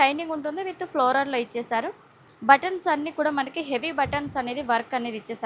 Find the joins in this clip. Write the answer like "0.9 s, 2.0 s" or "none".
none